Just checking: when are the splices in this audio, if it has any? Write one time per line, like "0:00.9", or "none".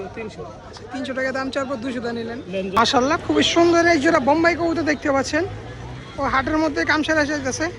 0:02.7